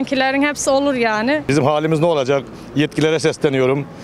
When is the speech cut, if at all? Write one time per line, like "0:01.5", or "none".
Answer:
0:01.4